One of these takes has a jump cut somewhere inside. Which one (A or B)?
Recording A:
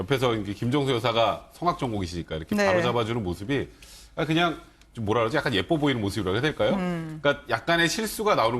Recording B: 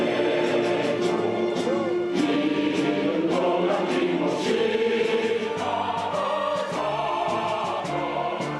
A